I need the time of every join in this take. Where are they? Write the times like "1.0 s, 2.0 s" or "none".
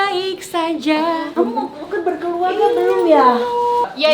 1.3 s